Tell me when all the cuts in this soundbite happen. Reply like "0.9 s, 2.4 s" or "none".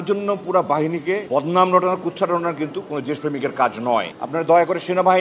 1.2 s, 4.2 s